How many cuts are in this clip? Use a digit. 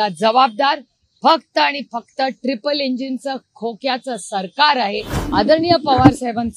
1